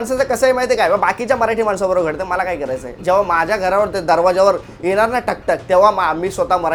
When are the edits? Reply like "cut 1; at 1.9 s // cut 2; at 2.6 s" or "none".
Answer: none